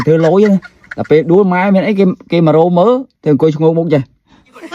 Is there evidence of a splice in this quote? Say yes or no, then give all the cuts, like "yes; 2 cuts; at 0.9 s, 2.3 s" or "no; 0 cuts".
yes; 1 cut; at 3.1 s